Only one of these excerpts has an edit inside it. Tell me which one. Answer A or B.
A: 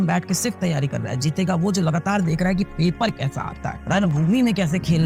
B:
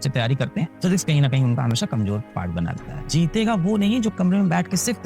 B